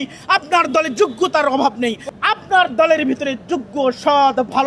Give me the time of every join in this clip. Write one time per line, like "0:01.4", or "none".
0:02.0

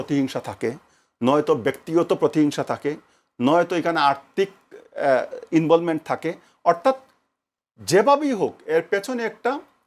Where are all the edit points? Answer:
none

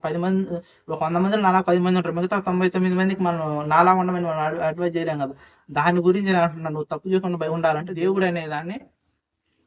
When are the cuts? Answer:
0:07.9

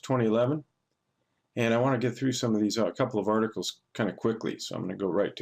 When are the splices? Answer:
0:03.5

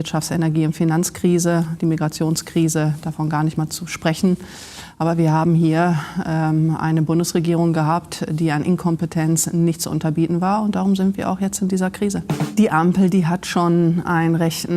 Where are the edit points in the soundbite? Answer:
0:12.4

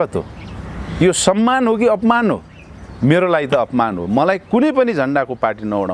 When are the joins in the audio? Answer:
none

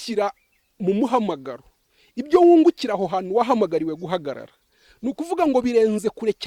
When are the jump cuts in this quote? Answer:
none

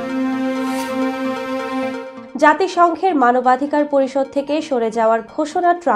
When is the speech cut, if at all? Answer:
0:02.1

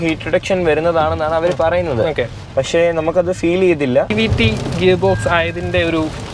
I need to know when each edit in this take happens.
0:04.1

